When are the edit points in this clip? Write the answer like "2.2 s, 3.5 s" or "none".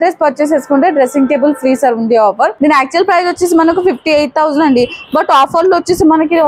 2.5 s